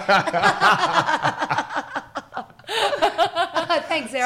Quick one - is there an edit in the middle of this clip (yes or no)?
no